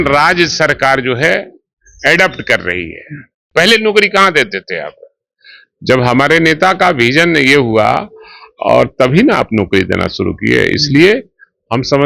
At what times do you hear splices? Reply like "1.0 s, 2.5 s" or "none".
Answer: 3.5 s